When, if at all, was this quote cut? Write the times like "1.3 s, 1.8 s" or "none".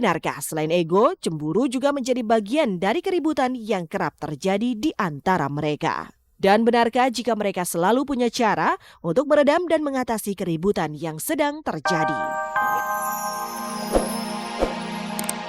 11.8 s